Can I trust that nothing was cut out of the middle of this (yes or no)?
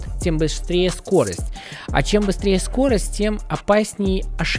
yes